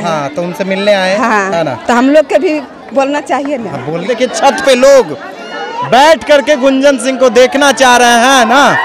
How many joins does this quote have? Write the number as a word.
one